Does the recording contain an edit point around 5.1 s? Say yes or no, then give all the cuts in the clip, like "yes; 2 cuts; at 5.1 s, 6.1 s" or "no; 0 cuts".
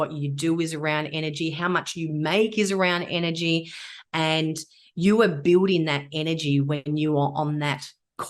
no; 1 cut; at 6.8 s